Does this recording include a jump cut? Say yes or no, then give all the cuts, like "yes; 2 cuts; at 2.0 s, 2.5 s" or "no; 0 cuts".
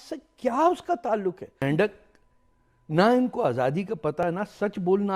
yes; 2 cuts; at 1.6 s, 4.2 s